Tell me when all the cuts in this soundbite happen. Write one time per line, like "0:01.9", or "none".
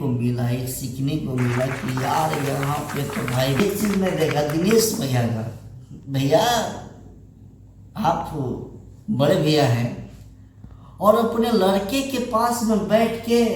0:03.6